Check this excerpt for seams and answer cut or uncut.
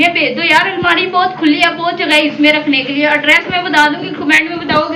uncut